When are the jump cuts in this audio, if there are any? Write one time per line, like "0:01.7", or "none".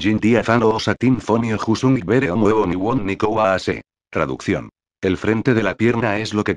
0:03.7